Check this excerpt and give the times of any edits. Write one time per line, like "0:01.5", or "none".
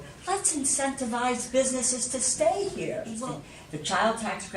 0:03.2